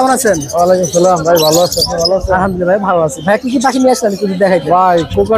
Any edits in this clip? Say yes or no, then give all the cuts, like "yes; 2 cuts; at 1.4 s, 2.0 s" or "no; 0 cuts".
no; 0 cuts